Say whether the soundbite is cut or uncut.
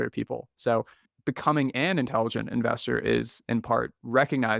cut